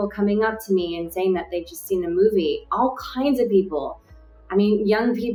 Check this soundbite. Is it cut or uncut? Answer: uncut